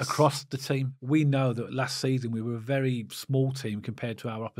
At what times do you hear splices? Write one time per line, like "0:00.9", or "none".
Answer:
0:00.9